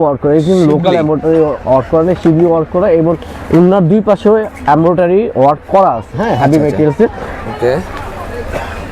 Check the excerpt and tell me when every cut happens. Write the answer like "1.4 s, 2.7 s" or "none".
none